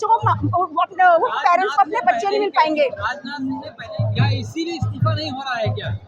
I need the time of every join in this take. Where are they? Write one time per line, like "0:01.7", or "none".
0:03.8